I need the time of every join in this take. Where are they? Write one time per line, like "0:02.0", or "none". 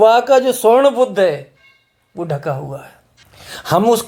none